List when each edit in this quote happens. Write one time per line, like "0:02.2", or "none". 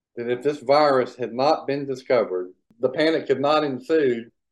0:02.6